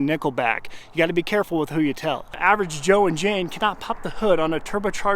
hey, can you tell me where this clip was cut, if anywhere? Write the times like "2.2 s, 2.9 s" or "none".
2.4 s